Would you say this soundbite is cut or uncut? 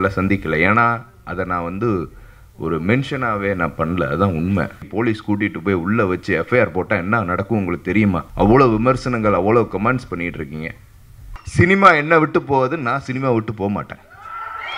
cut